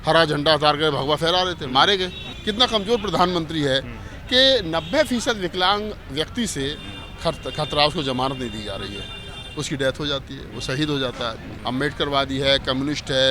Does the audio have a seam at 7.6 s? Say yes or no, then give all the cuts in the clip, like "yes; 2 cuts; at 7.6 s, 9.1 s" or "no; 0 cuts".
no; 2 cuts; at 2.3 s, 11.5 s